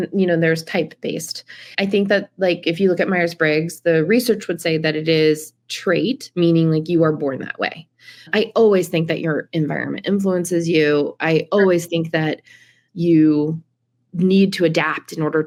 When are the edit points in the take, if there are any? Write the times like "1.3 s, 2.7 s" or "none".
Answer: none